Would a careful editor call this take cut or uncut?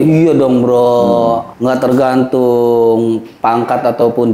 cut